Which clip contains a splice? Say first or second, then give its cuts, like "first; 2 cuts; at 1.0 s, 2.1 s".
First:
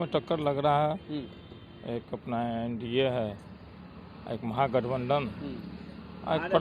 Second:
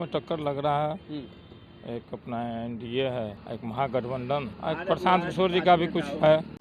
second; 2 cuts; at 3.4 s, 4.5 s